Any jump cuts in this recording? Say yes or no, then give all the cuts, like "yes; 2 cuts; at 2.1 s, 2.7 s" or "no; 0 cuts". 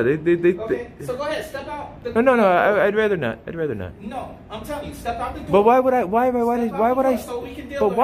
no; 0 cuts